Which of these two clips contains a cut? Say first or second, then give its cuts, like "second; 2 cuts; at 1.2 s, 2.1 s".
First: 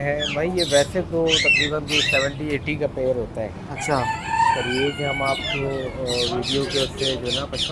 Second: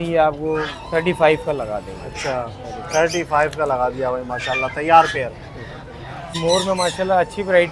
second; 1 cut; at 6.3 s